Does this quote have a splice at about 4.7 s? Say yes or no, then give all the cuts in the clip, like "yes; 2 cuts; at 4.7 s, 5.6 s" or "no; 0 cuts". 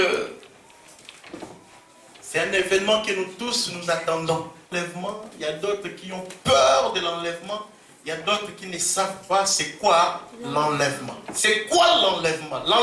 yes; 1 cut; at 4.7 s